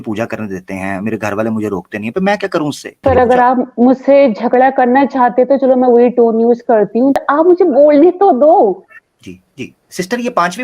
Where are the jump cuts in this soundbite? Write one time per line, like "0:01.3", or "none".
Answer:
0:02.9
0:07.2